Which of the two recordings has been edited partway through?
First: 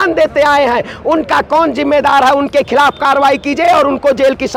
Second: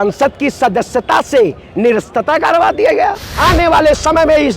second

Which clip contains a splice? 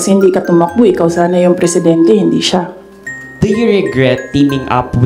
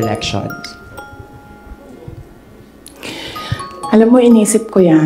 first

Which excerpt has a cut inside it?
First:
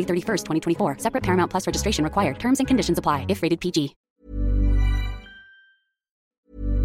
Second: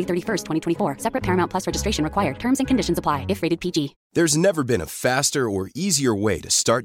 second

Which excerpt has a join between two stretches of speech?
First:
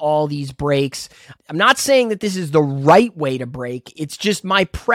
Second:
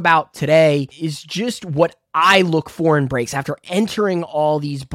second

